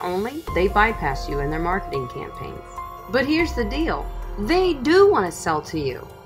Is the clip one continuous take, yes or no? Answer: yes